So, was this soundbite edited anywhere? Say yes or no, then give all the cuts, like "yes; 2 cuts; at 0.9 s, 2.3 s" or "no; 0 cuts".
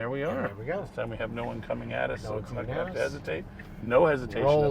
yes; 1 cut; at 1.0 s